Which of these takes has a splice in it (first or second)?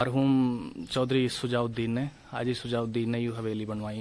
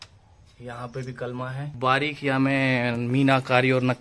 second